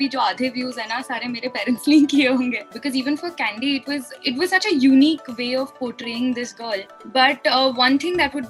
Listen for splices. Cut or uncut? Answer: cut